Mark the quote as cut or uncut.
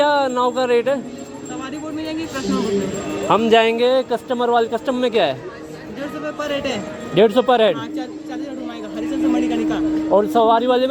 uncut